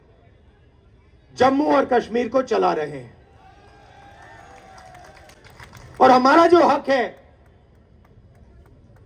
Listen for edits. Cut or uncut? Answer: uncut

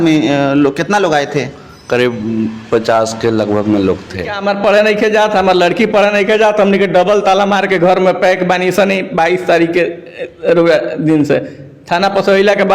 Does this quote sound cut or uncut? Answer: cut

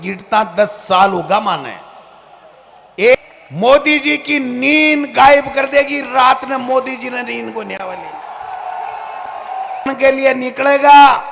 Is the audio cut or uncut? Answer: cut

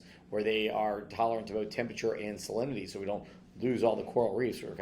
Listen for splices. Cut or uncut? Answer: uncut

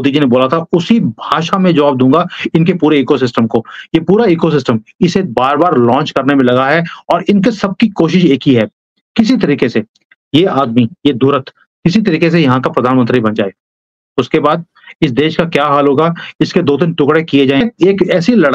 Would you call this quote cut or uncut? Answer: cut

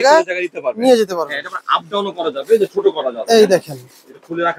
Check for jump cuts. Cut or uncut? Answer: uncut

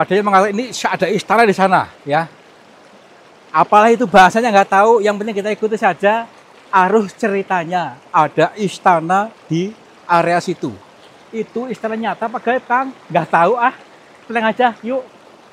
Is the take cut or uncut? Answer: uncut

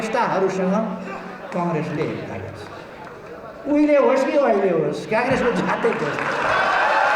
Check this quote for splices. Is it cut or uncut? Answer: uncut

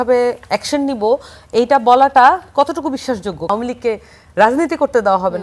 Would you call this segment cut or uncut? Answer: cut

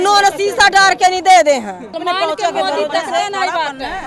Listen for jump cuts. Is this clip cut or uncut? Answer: uncut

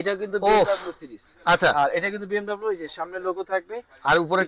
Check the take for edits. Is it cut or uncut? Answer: uncut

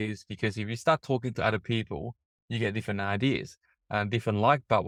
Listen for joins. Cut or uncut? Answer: uncut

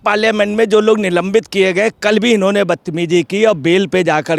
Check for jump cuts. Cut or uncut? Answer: uncut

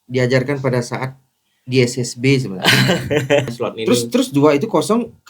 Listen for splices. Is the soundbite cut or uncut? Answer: cut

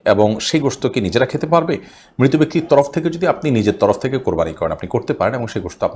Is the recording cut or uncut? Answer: uncut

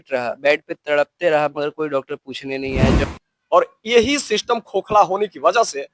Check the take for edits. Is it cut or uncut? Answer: cut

